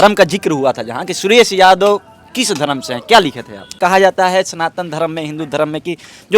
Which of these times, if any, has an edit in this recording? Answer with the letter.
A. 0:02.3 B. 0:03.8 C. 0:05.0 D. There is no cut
B